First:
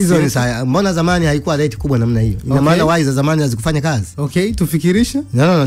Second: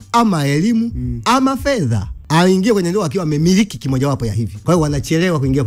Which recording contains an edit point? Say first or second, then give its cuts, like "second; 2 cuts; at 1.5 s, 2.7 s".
second; 2 cuts; at 2.1 s, 4.5 s